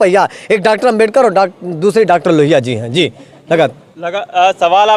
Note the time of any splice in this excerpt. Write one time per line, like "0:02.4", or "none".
none